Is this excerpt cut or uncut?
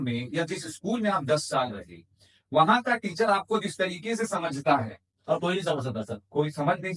uncut